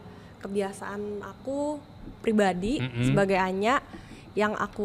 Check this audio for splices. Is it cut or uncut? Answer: uncut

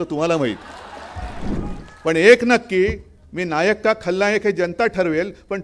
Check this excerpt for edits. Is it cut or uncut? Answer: cut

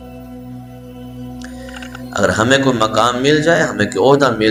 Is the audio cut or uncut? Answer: uncut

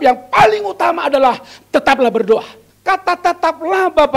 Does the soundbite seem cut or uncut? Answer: cut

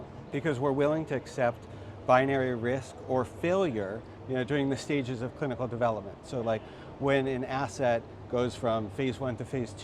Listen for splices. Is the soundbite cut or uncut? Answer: uncut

